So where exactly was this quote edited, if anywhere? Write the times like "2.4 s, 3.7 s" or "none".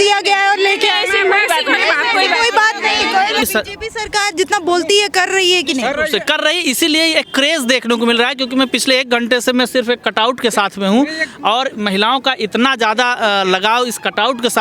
none